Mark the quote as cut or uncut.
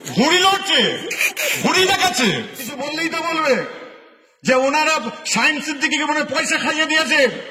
cut